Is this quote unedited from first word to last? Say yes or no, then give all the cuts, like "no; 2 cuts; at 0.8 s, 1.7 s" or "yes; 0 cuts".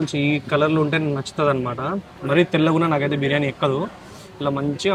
yes; 0 cuts